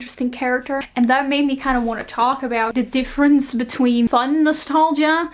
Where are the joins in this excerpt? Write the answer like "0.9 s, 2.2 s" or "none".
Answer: 0.9 s, 2.7 s, 4.1 s